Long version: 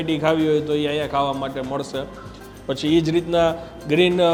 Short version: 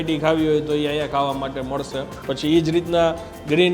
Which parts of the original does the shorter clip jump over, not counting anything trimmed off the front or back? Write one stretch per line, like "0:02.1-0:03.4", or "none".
0:02.1-0:02.5